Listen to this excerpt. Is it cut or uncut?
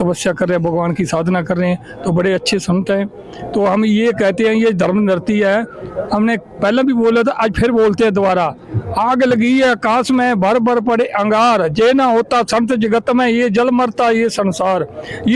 uncut